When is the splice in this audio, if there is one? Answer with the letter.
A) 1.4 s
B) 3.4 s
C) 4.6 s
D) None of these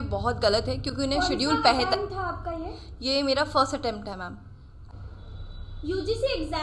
D